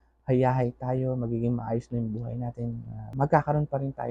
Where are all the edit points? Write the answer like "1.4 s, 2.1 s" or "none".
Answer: 3.1 s